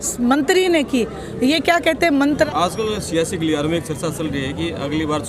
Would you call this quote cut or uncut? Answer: cut